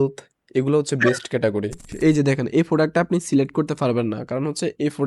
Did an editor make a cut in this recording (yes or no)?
yes